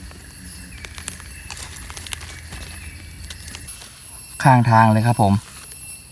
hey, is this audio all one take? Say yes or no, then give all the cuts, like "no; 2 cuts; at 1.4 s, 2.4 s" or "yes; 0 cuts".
no; 1 cut; at 3.7 s